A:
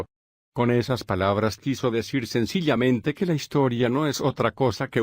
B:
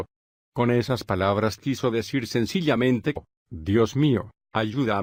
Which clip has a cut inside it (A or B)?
A